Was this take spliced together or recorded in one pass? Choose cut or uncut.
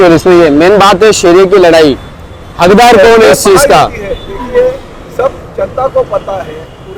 uncut